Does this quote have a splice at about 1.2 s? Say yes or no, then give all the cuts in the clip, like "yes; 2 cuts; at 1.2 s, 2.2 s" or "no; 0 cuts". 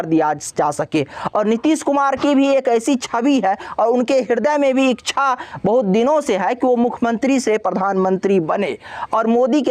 no; 0 cuts